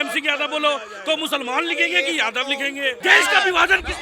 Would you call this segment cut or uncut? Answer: cut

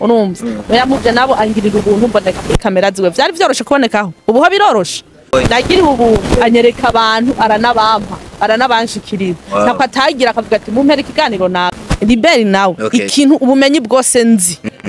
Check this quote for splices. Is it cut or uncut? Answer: cut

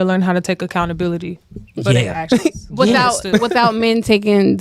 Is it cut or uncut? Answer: uncut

